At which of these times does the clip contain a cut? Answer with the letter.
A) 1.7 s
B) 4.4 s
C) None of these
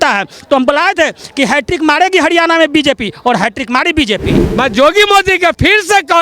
B